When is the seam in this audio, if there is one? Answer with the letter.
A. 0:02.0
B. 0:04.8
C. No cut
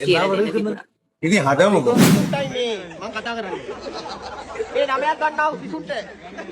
A